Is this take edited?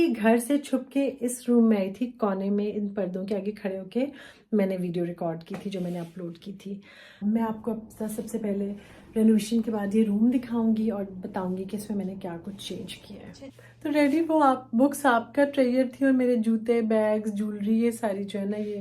yes; 2 cuts; at 7.2 s, 13.5 s

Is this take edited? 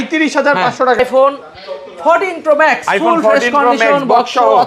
yes; 1 cut; at 1.0 s

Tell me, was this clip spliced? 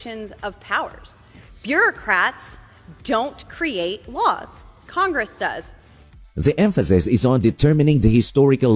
no; 0 cuts

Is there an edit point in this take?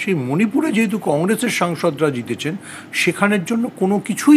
no; 0 cuts

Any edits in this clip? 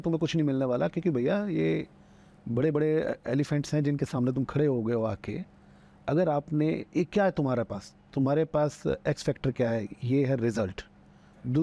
no; 0 cuts

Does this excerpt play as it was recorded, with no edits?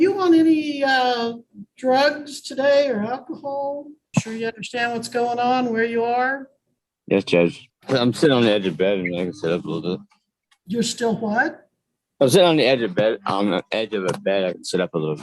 no; 2 cuts; at 3.9 s, 7.7 s

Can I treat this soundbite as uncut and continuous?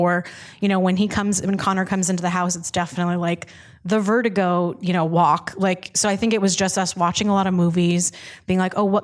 yes; 0 cuts

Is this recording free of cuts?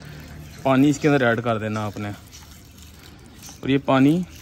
yes; 0 cuts

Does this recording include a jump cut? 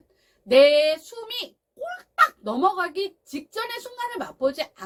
no; 0 cuts

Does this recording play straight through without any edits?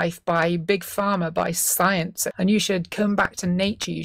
no; 1 cut; at 2.2 s

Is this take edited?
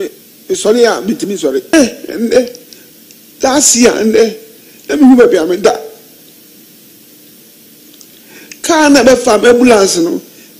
yes; 1 cut; at 1.7 s

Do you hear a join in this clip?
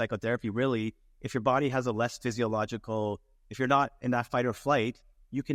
no; 0 cuts

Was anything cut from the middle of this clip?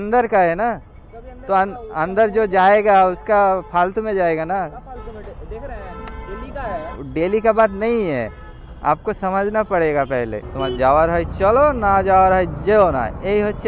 yes; 1 cut; at 10.4 s

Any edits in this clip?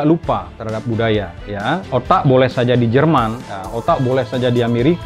yes; 1 cut; at 1.8 s

